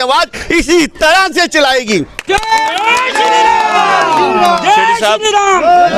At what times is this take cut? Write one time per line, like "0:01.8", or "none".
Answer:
none